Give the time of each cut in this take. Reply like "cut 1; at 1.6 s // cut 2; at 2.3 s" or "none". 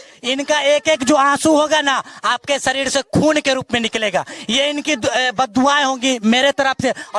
none

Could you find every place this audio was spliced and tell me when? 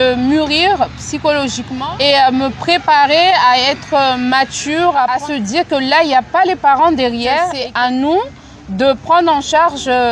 cut 1; at 1.7 s // cut 2; at 5.1 s // cut 3; at 7.6 s

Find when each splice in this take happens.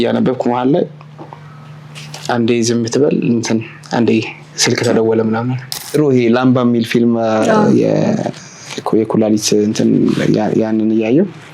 cut 1; at 5.8 s

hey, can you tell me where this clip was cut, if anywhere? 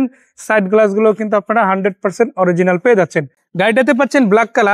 cut 1; at 3.4 s

